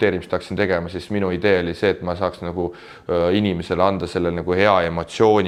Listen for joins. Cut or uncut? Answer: uncut